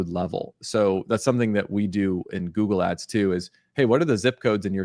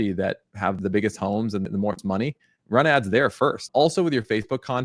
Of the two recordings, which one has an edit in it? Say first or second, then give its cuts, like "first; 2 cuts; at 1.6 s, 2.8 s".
second; 3 cuts; at 0.8 s, 2.0 s, 3.7 s